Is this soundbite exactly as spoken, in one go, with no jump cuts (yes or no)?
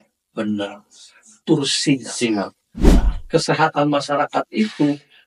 no